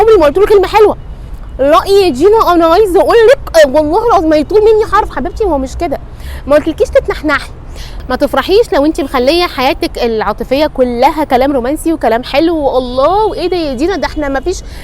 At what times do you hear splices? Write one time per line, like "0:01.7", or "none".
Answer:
0:08.0